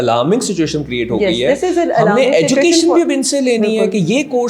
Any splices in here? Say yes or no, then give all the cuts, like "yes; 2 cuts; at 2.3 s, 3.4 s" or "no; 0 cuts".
no; 0 cuts